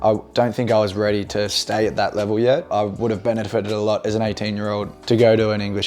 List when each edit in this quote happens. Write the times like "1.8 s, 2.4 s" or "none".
2.7 s, 5.0 s

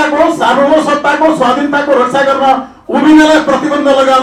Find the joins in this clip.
none

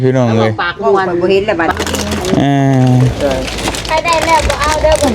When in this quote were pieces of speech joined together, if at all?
1.7 s

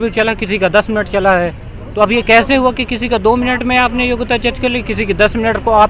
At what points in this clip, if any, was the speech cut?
none

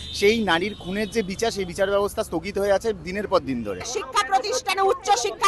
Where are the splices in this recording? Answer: 3.9 s

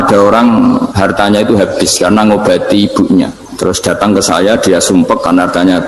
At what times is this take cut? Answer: 0.9 s, 3.4 s

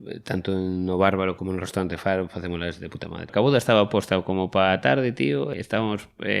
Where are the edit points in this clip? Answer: 1.4 s, 3.3 s, 5.5 s

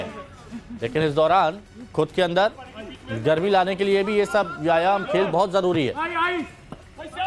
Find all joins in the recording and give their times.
6.1 s

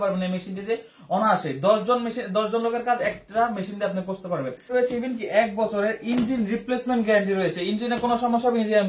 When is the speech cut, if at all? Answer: 4.6 s

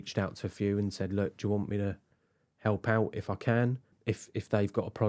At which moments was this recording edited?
3.9 s

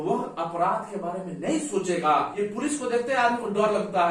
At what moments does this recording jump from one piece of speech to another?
2.3 s

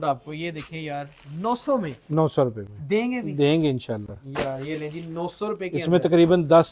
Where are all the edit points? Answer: none

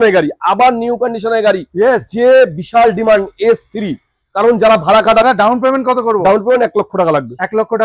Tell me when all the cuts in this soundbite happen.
5.2 s

